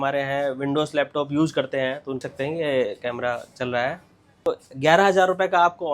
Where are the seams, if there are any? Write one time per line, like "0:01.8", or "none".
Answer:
0:02.2
0:04.4

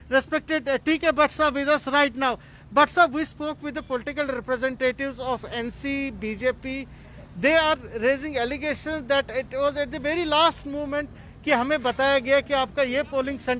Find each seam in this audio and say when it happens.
none

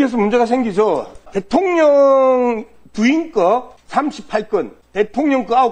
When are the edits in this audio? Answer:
0:01.3
0:03.8
0:04.8

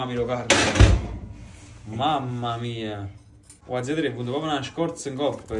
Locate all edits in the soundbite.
none

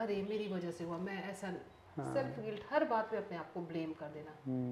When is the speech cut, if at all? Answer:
0:01.8

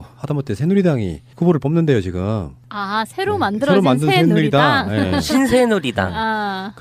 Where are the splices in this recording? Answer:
0:01.3

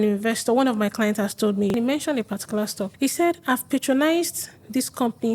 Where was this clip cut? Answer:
0:01.7
0:02.8

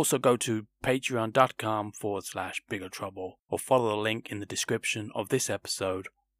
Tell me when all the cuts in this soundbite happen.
0:03.4

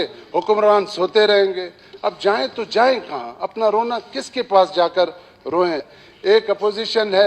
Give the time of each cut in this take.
0:05.9

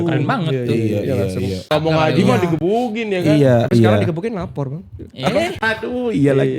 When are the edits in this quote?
0:01.7

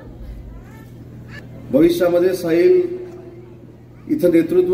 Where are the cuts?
0:01.4

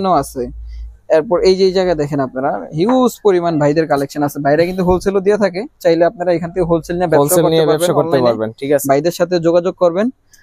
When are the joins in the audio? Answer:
none

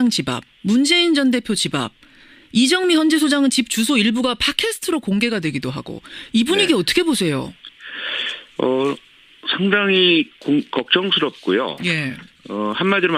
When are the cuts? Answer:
0:11.8

